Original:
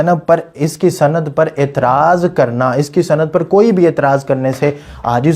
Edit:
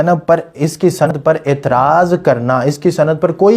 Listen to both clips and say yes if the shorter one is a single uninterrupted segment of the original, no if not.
no